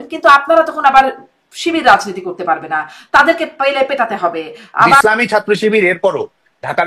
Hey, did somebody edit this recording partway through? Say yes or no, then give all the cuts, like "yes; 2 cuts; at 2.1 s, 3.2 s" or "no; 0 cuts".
yes; 1 cut; at 5.0 s